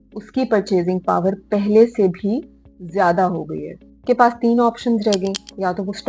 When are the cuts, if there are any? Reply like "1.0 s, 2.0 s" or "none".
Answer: 4.0 s